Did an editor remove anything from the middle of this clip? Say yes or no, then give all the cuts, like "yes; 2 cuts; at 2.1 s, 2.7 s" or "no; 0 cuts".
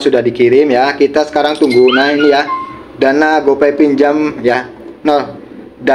no; 0 cuts